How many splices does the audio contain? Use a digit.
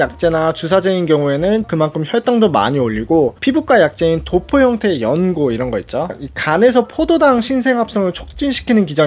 2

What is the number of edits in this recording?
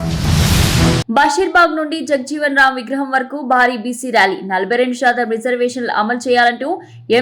1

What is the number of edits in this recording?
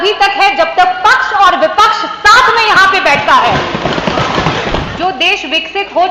1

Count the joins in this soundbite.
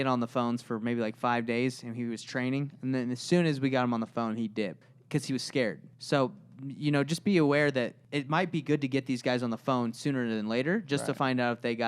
3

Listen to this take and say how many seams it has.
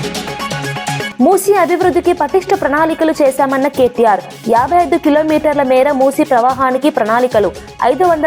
0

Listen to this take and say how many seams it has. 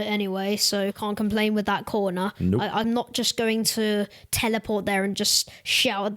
1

